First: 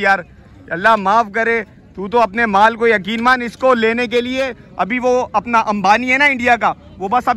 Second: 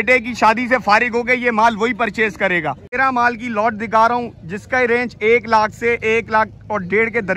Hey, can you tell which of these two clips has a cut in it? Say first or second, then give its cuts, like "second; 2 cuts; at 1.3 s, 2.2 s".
second; 1 cut; at 2.9 s